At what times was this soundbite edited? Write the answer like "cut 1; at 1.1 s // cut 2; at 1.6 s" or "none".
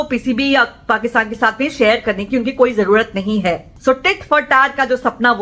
cut 1; at 3.7 s